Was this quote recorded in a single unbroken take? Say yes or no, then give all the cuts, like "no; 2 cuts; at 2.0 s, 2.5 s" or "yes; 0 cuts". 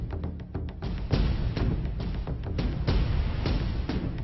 no; 1 cut; at 0.9 s